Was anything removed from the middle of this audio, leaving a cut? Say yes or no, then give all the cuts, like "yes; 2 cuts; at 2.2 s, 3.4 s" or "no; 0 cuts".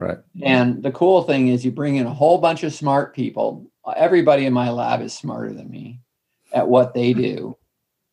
no; 0 cuts